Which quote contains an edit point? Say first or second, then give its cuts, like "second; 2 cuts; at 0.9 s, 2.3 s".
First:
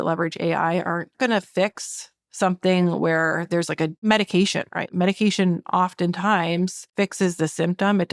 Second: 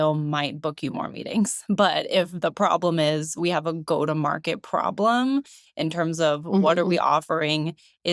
first; 4 cuts; at 1.1 s, 4.0 s, 4.9 s, 6.8 s